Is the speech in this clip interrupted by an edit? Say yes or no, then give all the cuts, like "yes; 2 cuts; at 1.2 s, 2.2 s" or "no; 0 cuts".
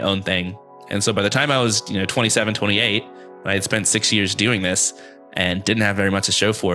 no; 0 cuts